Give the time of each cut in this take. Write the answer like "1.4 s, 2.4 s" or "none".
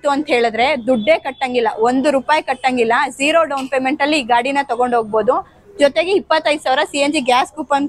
none